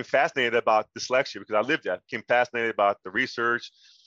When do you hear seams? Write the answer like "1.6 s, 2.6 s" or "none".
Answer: none